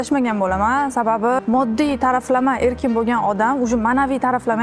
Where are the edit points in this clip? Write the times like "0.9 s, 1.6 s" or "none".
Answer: 1.4 s